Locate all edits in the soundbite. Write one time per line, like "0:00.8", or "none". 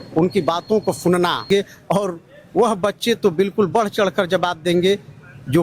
0:01.5